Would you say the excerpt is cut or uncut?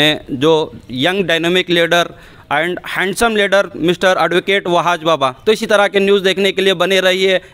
uncut